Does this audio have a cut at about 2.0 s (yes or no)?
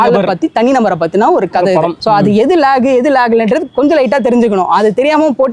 yes